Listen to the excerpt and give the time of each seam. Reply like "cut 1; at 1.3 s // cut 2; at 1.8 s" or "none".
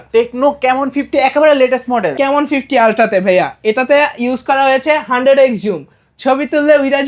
cut 1; at 2.1 s